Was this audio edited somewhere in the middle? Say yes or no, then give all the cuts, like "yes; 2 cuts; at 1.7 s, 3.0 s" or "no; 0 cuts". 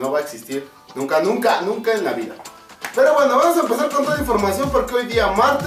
yes; 1 cut; at 3.6 s